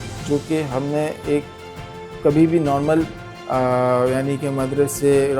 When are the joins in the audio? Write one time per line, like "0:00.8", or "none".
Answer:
none